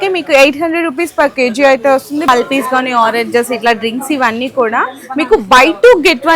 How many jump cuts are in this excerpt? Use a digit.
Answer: 1